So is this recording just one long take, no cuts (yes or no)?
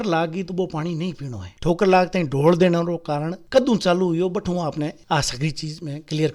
no